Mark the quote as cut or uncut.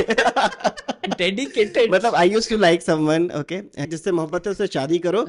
cut